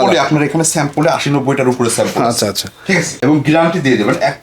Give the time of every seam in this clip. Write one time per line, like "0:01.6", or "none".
0:03.1